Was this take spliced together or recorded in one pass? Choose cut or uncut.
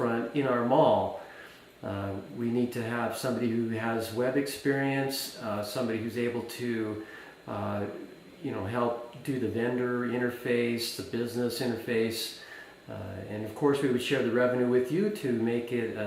cut